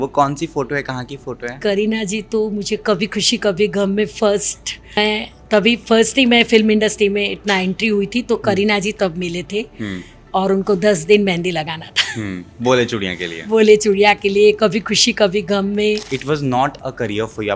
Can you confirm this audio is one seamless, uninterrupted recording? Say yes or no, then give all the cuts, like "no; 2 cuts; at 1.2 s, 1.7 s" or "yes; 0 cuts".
no; 2 cuts; at 5.0 s, 16.1 s